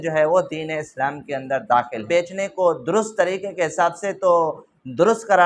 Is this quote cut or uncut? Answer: cut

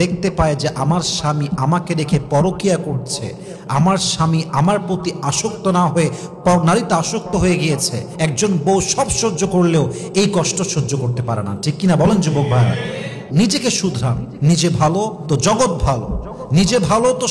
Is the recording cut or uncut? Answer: cut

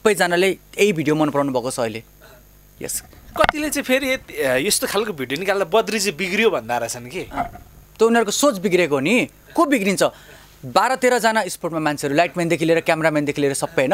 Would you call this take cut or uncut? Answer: uncut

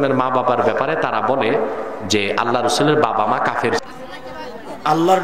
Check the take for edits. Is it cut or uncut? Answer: cut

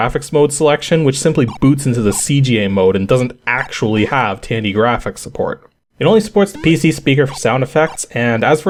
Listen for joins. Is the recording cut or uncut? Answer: uncut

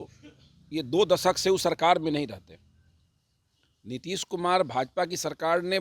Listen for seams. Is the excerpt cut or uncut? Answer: uncut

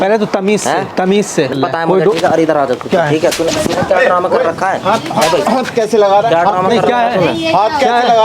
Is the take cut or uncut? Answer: cut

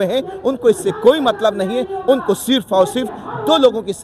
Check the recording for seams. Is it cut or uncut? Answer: uncut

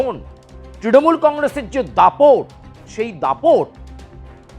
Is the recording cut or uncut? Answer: cut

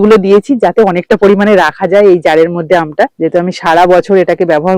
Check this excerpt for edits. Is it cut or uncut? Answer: uncut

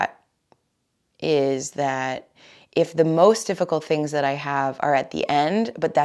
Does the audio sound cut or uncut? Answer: uncut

